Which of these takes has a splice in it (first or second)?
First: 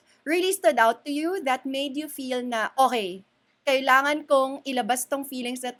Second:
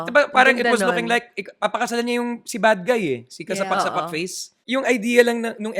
second